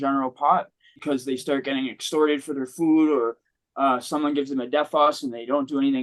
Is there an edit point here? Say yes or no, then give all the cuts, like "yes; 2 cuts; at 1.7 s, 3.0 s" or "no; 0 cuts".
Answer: yes; 1 cut; at 1.0 s